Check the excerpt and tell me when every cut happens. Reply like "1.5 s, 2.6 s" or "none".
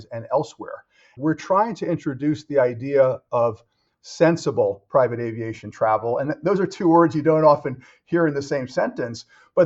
1.1 s